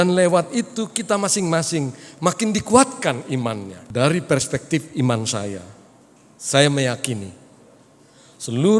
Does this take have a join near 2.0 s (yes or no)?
no